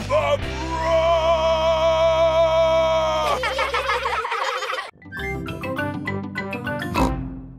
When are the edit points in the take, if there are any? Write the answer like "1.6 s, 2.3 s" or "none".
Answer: 4.9 s